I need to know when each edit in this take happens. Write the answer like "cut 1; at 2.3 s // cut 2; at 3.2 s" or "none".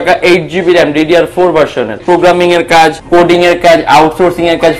cut 1; at 2.0 s // cut 2; at 3.0 s